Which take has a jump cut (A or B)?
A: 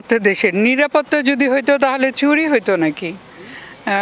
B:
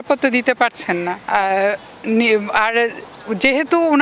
B